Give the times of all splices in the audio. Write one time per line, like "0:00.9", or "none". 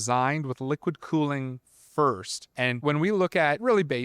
0:02.8